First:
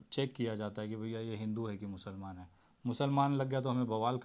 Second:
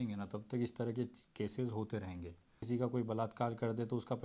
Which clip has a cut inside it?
second; 1 cut; at 2.6 s

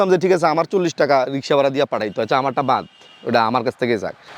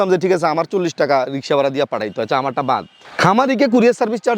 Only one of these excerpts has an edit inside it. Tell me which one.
second; 1 cut; at 3.0 s

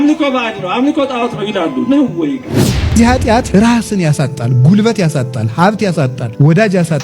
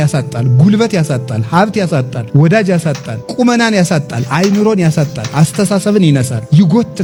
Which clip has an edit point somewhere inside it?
first; 1 cut; at 2.8 s

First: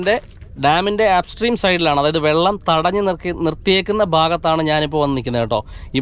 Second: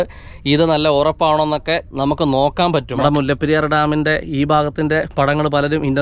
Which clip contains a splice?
second; 1 cut; at 3.0 s

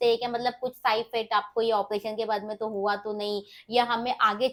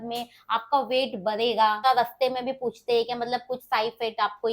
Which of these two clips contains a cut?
second; 1 cut; at 1.8 s

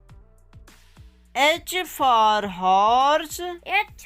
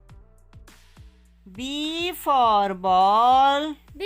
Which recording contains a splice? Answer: second; 1 cut; at 1.2 s

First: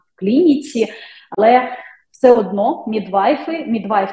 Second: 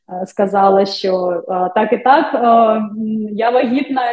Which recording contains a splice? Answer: first; 1 cut; at 1.4 s

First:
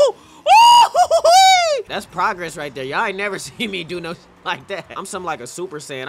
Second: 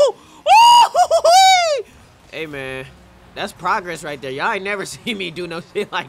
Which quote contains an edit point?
first; 2 cuts; at 1.9 s, 4.9 s

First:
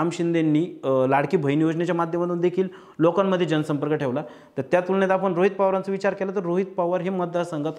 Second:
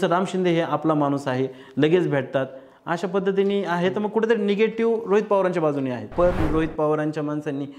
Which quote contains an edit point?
second; 1 cut; at 6.4 s

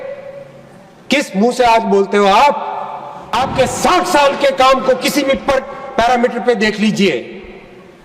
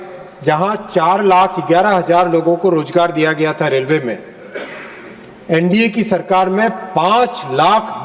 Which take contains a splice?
first; 1 cut; at 3.3 s

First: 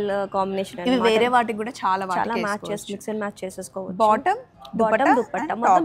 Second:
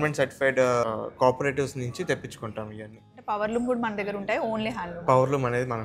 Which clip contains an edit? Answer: second; 2 cuts; at 0.9 s, 3.1 s

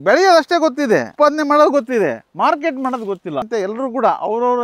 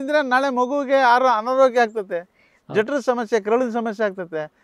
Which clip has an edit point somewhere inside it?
first; 2 cuts; at 1.1 s, 3.5 s

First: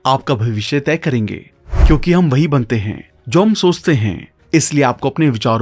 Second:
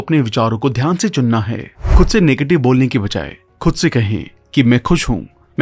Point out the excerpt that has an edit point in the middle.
second; 1 cut; at 1.8 s

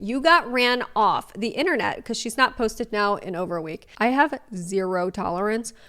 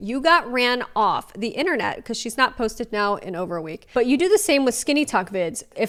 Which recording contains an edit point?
first; 1 cut; at 3.8 s

